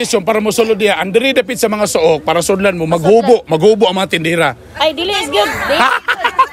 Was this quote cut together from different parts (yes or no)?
no